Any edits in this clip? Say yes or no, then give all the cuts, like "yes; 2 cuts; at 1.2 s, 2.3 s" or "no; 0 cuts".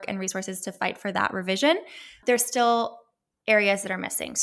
yes; 1 cut; at 2.2 s